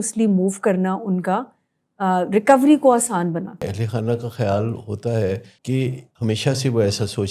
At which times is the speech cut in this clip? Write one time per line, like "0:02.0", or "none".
0:03.7
0:05.8